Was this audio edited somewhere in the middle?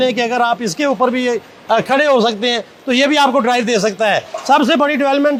no; 0 cuts

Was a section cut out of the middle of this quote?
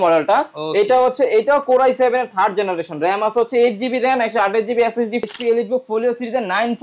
yes; 1 cut; at 5.3 s

